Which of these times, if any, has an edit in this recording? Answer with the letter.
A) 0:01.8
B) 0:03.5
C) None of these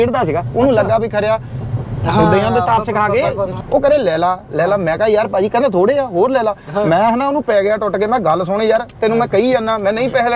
B